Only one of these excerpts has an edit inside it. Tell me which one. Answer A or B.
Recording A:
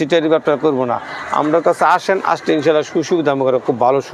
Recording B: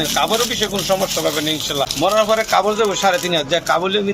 B